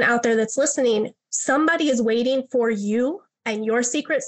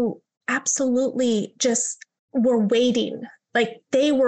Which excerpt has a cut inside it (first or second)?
first